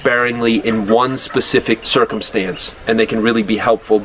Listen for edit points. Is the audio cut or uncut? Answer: cut